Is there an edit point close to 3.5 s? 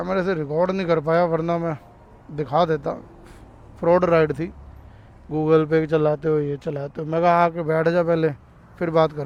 no; 0 cuts

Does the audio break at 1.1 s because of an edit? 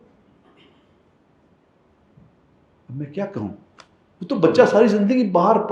no; 0 cuts

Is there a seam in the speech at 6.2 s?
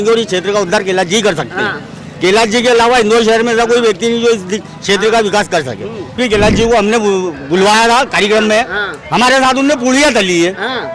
yes; 1 cut; at 6.2 s

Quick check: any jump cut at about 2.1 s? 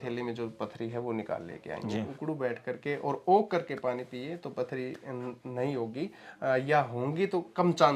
yes; 1 cut; at 2.1 s

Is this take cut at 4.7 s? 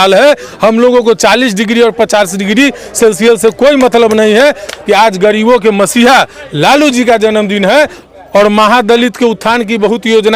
yes; 2 cuts; at 4.7 s, 8.0 s

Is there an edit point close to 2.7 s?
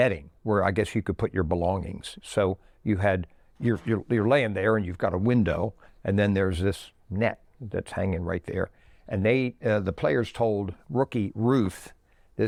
no; 0 cuts

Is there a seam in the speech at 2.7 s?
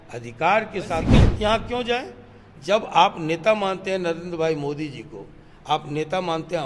no; 1 cut; at 1.1 s

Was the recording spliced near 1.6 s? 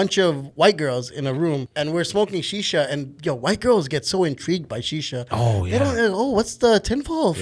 yes; 1 cut; at 1.6 s

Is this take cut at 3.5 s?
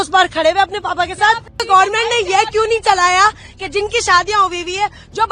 no; 1 cut; at 1.7 s

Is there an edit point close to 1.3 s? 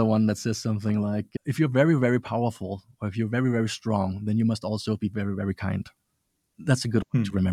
yes; 2 cuts; at 1.3 s, 6.5 s

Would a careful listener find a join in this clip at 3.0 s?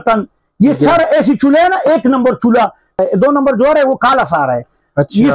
yes; 1 cut; at 3.0 s

